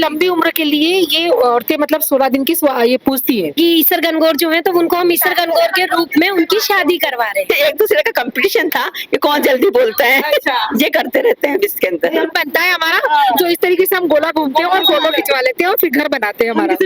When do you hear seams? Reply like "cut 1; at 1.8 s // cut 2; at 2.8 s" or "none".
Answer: cut 1; at 3.5 s // cut 2; at 7.5 s // cut 3; at 12.3 s